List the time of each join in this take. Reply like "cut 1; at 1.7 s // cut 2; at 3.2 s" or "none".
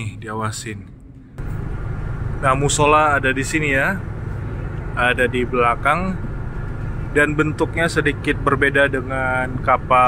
cut 1; at 1.4 s